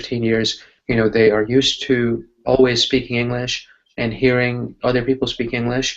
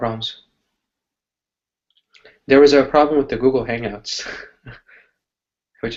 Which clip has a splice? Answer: first; 1 cut; at 1.8 s

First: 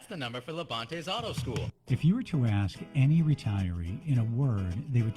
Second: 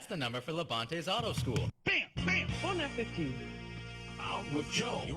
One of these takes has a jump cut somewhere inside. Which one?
first; 1 cut; at 1.8 s

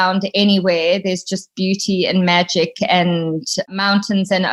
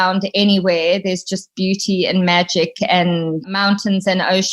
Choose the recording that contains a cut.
second; 1 cut; at 3.5 s

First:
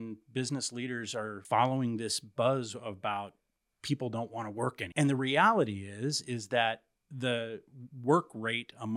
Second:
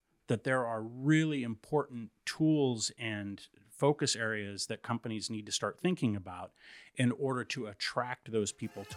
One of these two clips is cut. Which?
first; 2 cuts; at 1.4 s, 4.8 s

